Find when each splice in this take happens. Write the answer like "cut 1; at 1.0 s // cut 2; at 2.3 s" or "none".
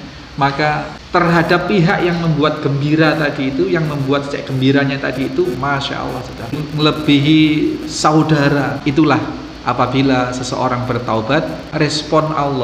cut 1; at 1.0 s // cut 2; at 6.6 s // cut 3; at 8.8 s // cut 4; at 11.7 s